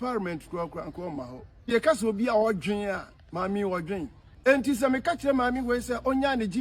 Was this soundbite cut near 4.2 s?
yes; 2 cuts; at 1.7 s, 4.2 s

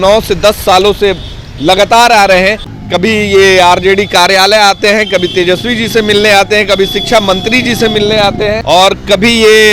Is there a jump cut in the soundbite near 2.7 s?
yes; 2 cuts; at 2.7 s, 8.6 s

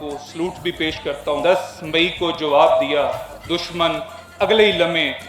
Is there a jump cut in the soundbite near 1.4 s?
yes; 1 cut; at 1.4 s

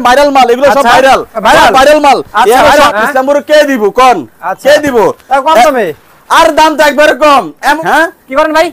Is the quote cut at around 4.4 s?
no; 2 cuts; at 2.9 s, 7.8 s

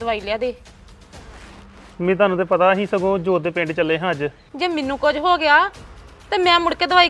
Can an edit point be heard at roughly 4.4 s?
yes; 1 cut; at 4.4 s

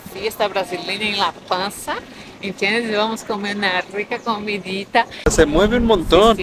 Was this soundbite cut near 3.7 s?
no; 1 cut; at 5.3 s

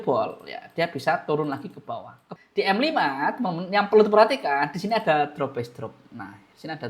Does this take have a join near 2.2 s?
yes; 1 cut; at 2.2 s

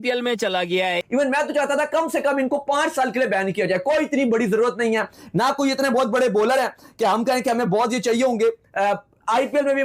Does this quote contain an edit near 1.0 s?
yes; 1 cut; at 1.0 s

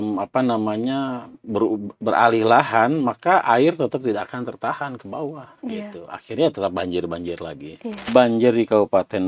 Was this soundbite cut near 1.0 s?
no; 1 cut; at 8.1 s

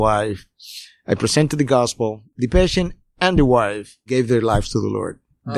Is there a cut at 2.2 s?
yes; 2 cuts; at 2.2 s, 4.0 s

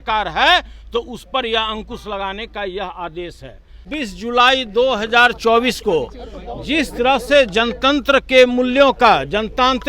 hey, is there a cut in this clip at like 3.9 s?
yes; 1 cut; at 3.9 s

